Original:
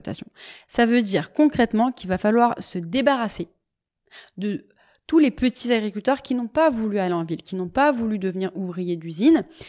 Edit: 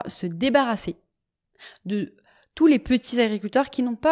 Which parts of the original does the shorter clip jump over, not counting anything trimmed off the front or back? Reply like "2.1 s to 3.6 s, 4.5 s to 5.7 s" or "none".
none